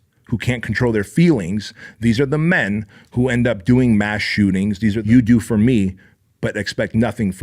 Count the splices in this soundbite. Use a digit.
1